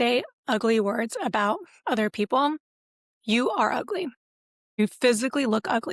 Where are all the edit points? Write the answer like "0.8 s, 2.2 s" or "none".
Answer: none